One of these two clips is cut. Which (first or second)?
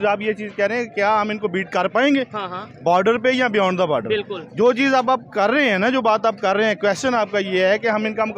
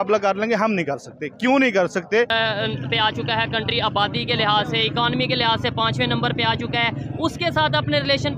second